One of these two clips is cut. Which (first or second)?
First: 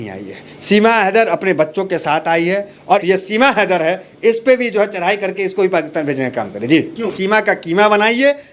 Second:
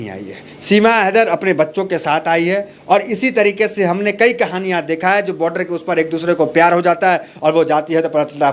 first